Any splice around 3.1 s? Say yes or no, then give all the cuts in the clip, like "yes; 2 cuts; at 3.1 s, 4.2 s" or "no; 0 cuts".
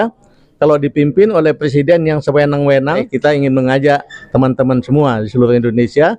yes; 1 cut; at 3.1 s